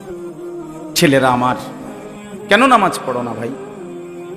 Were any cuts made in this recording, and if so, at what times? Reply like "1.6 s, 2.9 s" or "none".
1.0 s, 3.5 s